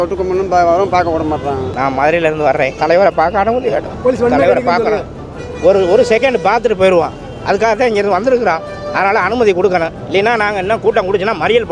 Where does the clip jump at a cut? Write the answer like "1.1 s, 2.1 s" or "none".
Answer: 1.7 s, 2.7 s, 3.9 s